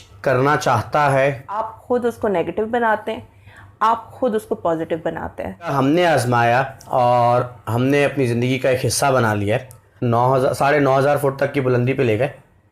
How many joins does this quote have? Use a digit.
3